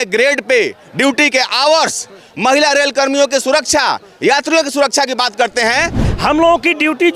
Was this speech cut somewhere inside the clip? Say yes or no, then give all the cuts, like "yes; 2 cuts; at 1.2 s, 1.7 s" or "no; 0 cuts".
yes; 1 cut; at 6.0 s